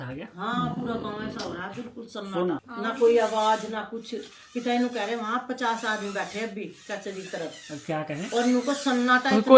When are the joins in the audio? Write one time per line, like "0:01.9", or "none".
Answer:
none

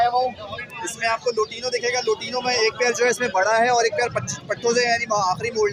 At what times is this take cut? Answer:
none

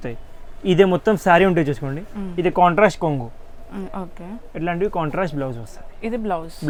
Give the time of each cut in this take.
none

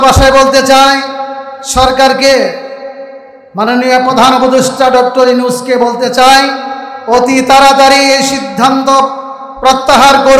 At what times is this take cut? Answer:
none

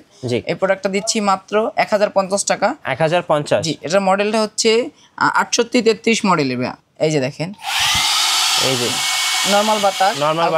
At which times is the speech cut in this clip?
0:06.8

